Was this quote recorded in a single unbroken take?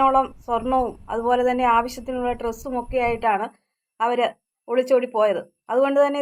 yes; 0 cuts

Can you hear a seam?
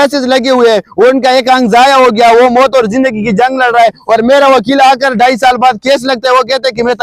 no; 0 cuts

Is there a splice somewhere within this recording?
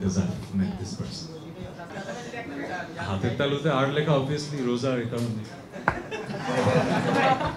no; 0 cuts

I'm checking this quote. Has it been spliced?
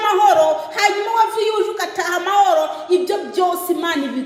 no; 0 cuts

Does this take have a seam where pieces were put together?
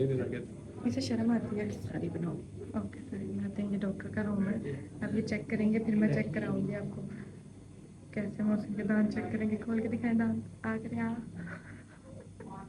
no; 0 cuts

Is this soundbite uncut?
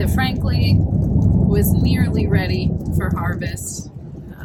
yes; 0 cuts

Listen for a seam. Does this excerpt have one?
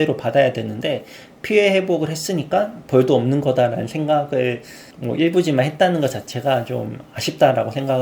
no; 0 cuts

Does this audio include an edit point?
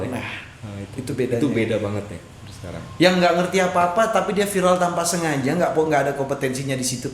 no; 0 cuts

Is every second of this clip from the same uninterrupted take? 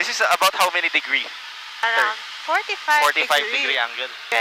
yes; 0 cuts

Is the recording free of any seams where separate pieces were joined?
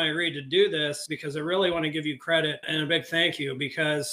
no; 2 cuts; at 1.0 s, 2.7 s

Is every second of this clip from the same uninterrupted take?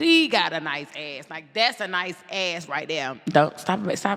no; 1 cut; at 3.1 s

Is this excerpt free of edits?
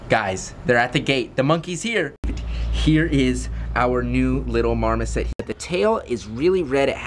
no; 2 cuts; at 2.3 s, 5.3 s

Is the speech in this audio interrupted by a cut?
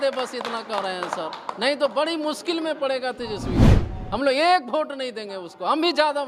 no; 0 cuts

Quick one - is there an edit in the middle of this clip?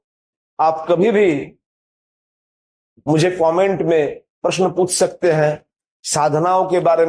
no; 0 cuts

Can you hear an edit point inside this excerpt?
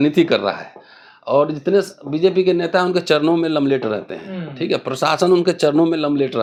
no; 0 cuts

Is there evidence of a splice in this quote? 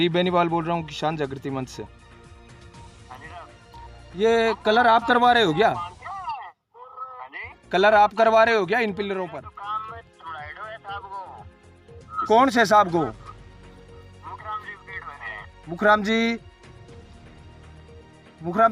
yes; 3 cuts; at 1.9 s, 4.1 s, 9.3 s

